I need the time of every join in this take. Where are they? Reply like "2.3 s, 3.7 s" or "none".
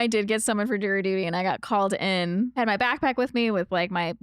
2.6 s